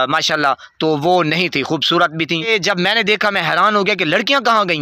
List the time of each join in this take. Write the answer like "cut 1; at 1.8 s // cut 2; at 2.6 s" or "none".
cut 1; at 2.5 s